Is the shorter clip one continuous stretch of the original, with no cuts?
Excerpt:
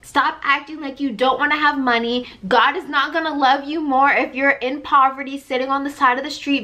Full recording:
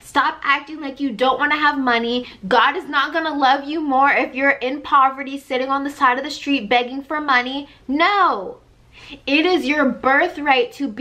yes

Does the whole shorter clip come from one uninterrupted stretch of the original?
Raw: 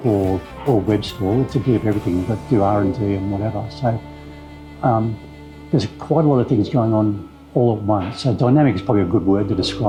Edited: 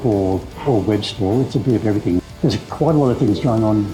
no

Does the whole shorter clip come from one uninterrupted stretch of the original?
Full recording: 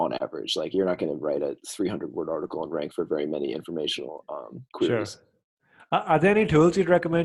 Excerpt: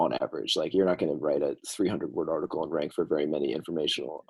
yes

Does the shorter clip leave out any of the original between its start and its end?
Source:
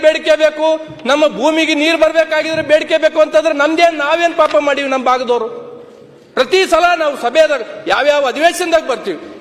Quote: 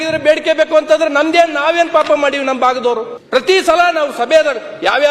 yes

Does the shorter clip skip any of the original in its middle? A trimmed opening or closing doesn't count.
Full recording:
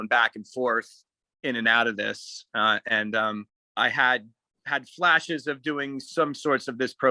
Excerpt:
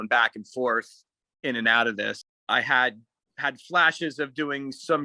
yes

